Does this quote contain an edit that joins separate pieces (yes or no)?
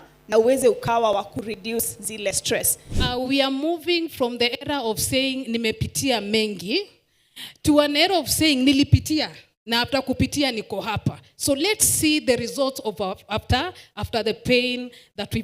yes